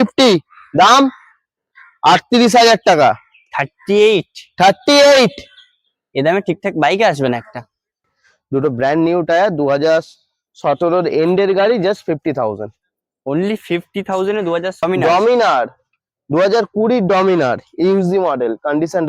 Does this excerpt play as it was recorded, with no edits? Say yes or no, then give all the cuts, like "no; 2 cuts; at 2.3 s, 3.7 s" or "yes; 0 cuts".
no; 2 cuts; at 8.2 s, 14.8 s